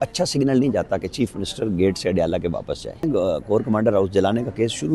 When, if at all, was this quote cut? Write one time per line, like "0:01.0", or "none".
0:03.0